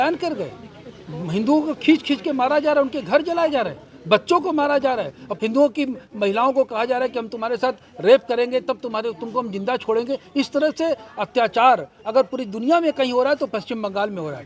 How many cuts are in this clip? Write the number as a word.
one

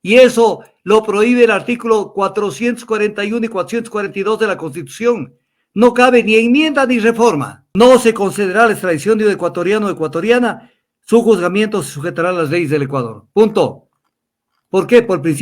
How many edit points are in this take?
one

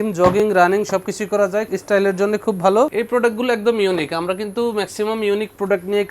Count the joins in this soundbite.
two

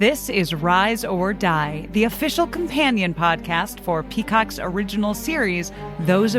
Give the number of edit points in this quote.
zero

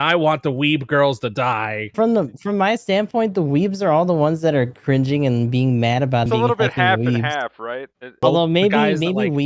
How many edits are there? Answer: three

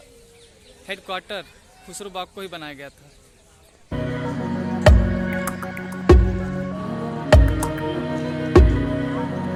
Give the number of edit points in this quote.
zero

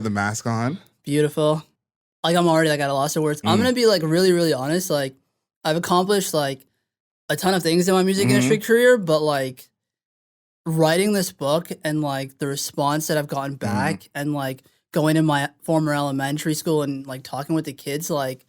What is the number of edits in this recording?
one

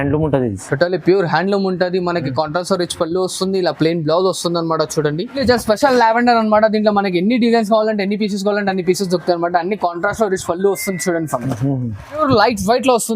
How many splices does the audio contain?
two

